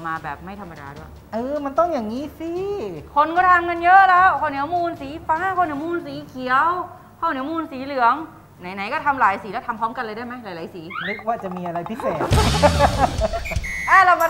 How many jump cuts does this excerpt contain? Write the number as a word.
one